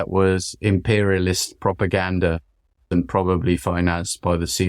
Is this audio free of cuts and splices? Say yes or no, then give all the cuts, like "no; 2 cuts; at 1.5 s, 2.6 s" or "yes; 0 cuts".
no; 1 cut; at 2.8 s